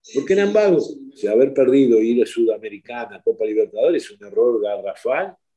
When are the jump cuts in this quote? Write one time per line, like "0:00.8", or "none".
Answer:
0:01.2